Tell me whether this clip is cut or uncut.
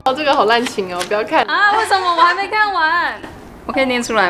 uncut